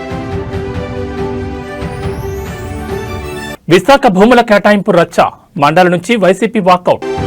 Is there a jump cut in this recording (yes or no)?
yes